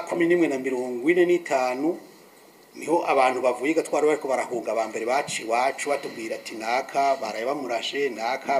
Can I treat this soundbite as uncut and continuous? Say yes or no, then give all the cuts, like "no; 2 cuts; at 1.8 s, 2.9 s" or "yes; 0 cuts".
yes; 0 cuts